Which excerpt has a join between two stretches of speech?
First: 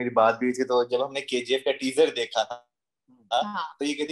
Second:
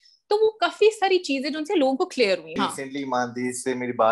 second; 1 cut; at 2.5 s

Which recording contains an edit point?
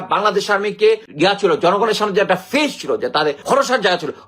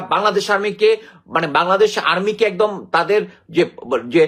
first; 2 cuts; at 1.1 s, 3.4 s

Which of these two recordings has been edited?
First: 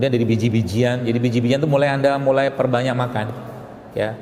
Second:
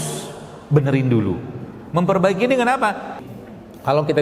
second; 1 cut; at 3.2 s

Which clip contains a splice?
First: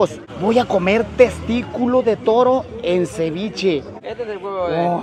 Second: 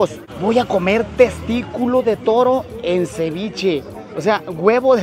first; 1 cut; at 4.0 s

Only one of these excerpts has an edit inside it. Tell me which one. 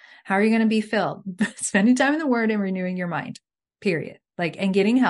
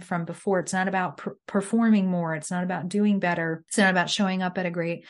second; 1 cut; at 3.6 s

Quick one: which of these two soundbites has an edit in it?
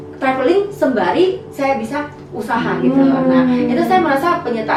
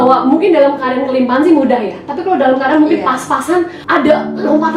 second; 1 cut; at 3.8 s

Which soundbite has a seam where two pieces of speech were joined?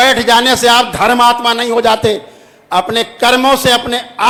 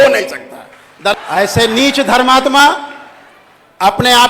second; 1 cut; at 1.1 s

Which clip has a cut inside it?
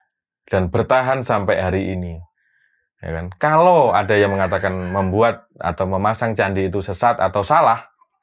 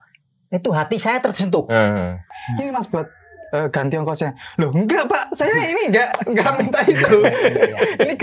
second; 1 cut; at 2.3 s

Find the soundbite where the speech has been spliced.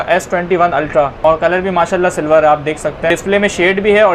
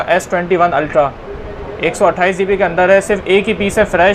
first; 2 cuts; at 1.2 s, 3.1 s

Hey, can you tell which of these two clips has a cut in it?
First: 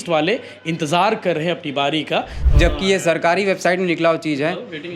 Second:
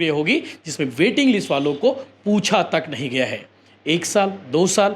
first; 1 cut; at 2.4 s

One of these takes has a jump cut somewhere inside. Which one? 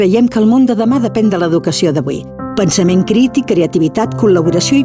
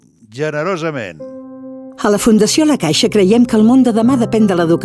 second; 1 cut; at 1.2 s

